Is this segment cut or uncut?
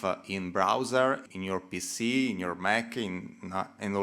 cut